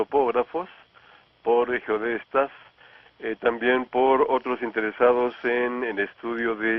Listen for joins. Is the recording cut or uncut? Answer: cut